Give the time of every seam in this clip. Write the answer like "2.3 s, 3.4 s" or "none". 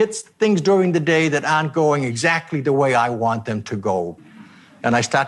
4.2 s